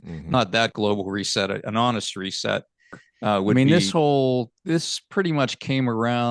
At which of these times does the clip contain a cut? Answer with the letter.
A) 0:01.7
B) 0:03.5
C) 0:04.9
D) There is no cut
B